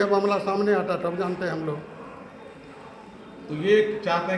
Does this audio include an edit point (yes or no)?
no